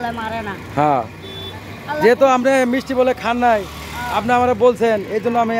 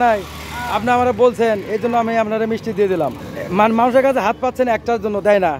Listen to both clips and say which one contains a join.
second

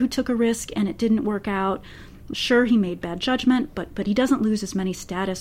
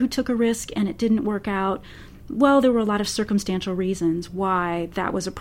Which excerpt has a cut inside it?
first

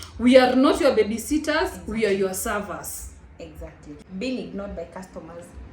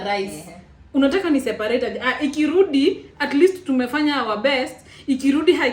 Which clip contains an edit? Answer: first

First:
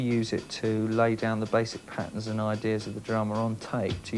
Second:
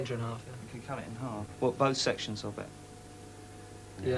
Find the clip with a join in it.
second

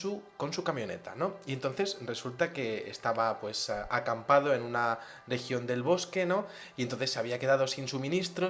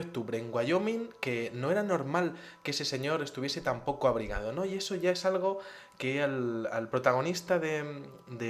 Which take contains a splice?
first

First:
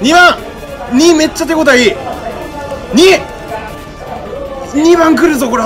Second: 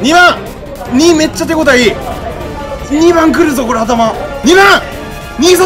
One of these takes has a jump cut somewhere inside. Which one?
second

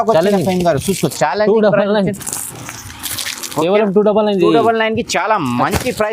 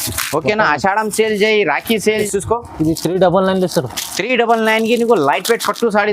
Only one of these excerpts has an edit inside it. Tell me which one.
second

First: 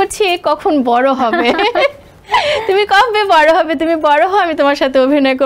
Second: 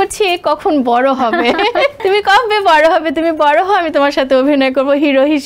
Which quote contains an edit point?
second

